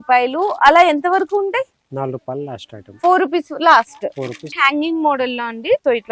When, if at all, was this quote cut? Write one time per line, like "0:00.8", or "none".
0:04.4